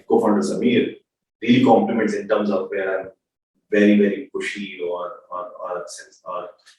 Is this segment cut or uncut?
uncut